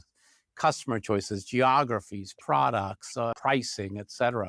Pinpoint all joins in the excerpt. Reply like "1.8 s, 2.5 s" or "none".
3.4 s